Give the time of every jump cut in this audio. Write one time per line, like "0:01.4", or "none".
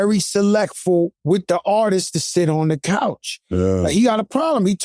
0:01.2